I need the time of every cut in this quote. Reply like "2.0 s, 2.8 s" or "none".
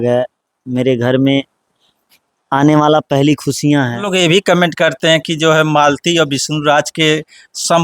4.0 s